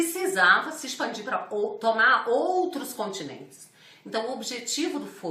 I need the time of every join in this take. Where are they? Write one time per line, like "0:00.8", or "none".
0:02.7